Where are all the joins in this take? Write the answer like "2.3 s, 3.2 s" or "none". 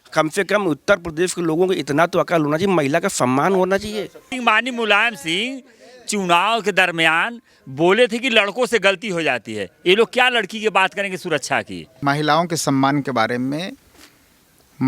4.2 s, 11.8 s